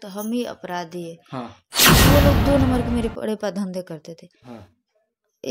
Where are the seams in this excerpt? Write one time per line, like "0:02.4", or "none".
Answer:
0:01.9